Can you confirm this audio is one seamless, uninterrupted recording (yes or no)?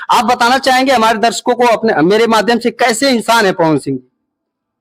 yes